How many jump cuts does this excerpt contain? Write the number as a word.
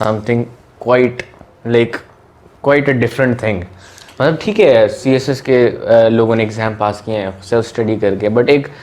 zero